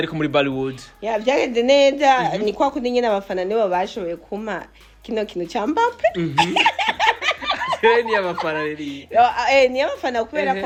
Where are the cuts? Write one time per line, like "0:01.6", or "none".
none